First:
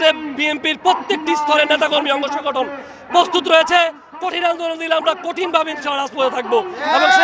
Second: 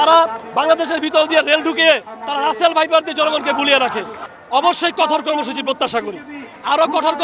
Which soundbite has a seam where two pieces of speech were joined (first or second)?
second